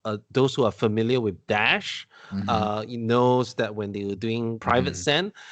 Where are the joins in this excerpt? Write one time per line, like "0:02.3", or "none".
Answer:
0:04.6